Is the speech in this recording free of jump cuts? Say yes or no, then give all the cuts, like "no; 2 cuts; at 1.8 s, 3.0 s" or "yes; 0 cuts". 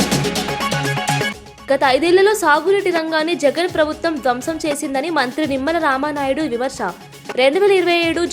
no; 1 cut; at 1.3 s